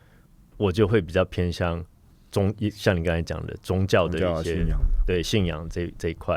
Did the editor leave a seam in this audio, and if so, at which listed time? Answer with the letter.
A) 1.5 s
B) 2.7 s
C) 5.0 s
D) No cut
D